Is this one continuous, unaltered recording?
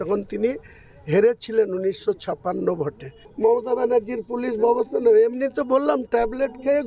no; 1 cut; at 3.2 s

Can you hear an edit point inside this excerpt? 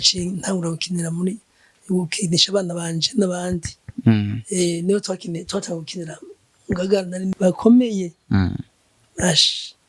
yes; 1 cut; at 7.3 s

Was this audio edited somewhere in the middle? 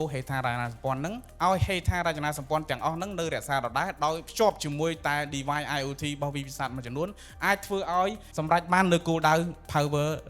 yes; 3 cuts; at 1.2 s, 4.3 s, 8.3 s

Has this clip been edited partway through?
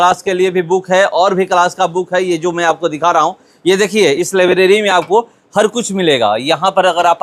no; 0 cuts

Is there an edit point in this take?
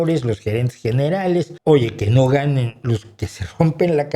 yes; 1 cut; at 1.5 s

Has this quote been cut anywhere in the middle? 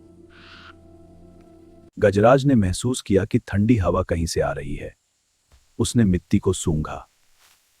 no; 0 cuts

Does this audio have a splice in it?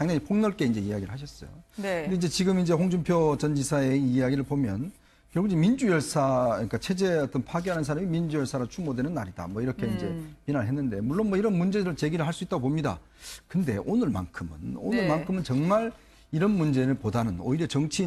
no; 0 cuts

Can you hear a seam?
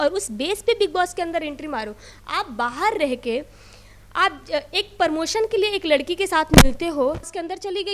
no; 0 cuts

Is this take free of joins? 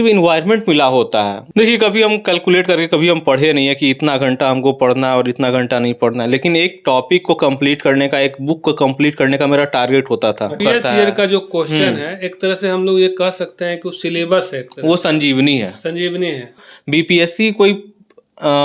no; 3 cuts; at 1.4 s, 10.6 s, 16.6 s

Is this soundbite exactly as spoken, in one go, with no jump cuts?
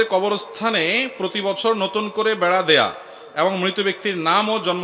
yes; 0 cuts

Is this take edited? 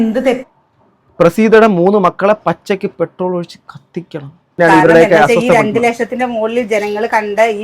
yes; 1 cut; at 4.6 s

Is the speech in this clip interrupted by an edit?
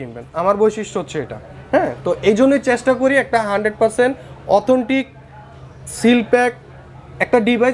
no; 0 cuts

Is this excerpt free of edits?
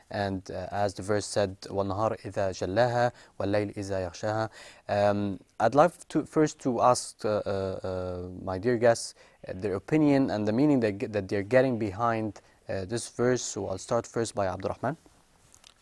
yes; 0 cuts

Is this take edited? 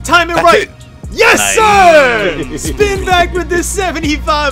no; 0 cuts

